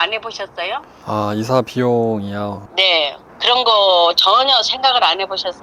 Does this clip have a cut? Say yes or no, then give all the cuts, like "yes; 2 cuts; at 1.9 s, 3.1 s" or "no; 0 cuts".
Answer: yes; 3 cuts; at 0.9 s, 2.6 s, 3.3 s